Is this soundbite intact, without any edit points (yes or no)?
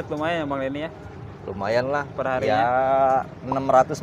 yes